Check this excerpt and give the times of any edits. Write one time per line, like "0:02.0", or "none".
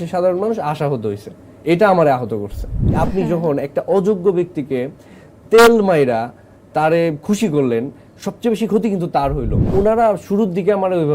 0:03.0
0:09.6